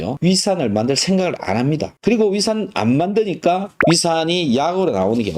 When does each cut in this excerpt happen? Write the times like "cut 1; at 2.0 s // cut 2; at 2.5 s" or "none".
none